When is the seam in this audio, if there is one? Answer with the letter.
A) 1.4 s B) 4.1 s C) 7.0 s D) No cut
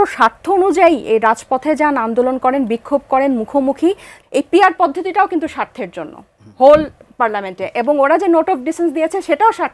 B